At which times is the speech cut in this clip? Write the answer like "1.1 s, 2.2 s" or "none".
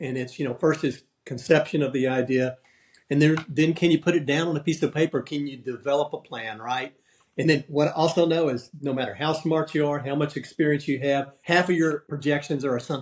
11.3 s, 12.1 s